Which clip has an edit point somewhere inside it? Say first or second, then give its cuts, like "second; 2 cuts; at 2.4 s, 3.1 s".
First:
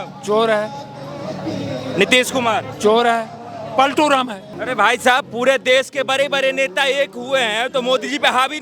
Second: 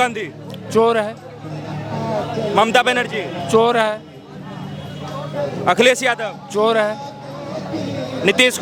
first; 1 cut; at 4.5 s